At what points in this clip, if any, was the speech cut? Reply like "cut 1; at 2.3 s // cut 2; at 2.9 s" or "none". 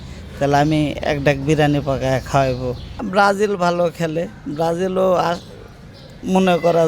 cut 1; at 2.9 s